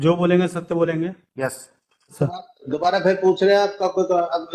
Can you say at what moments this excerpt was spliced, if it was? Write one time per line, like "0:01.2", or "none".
0:02.2